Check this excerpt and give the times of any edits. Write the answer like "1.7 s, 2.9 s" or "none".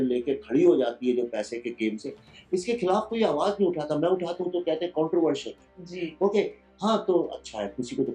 none